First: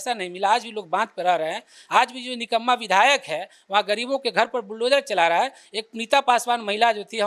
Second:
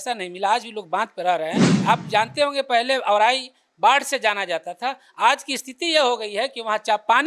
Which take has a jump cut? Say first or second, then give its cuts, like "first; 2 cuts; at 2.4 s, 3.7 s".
second; 1 cut; at 1.7 s